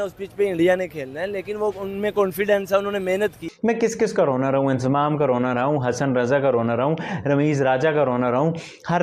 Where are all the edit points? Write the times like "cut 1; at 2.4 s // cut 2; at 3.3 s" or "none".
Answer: cut 1; at 3.4 s